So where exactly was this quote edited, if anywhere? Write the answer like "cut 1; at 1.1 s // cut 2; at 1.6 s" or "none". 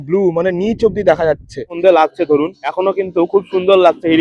cut 1; at 1.7 s // cut 2; at 2.6 s